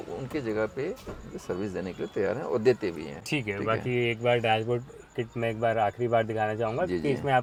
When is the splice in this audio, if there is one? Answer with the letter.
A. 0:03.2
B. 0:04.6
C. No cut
C